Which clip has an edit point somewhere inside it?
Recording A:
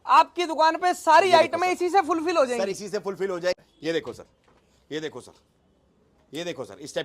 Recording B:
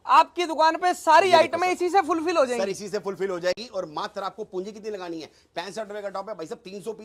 A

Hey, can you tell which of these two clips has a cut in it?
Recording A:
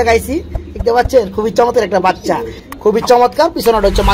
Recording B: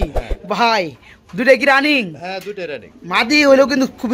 A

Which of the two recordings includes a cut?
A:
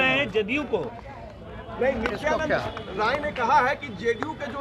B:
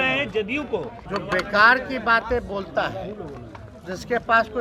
B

